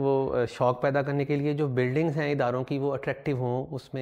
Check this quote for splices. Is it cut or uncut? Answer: uncut